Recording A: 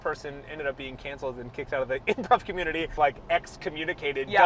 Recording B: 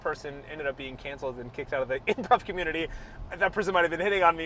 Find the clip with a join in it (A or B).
A